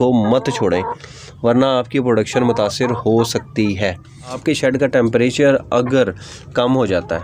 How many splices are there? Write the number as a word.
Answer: one